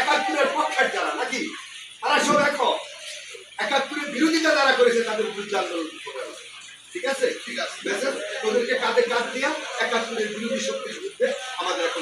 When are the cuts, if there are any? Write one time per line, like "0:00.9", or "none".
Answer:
none

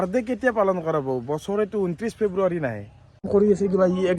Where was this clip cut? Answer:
0:03.3

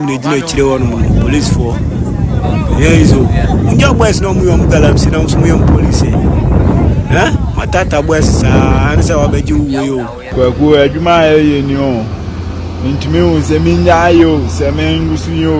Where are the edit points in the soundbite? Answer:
0:10.2

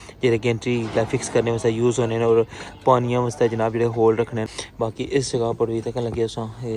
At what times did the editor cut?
0:04.5

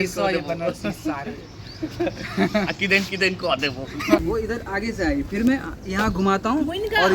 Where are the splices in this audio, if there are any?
0:04.2

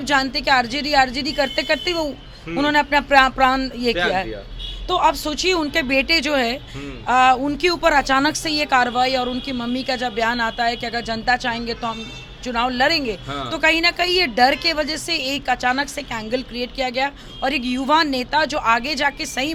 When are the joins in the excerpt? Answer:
none

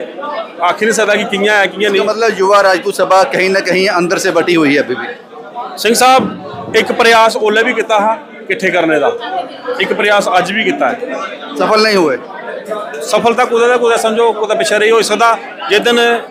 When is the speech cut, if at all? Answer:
none

